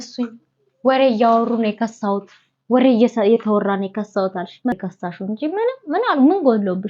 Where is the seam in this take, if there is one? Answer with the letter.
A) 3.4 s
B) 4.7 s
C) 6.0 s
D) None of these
B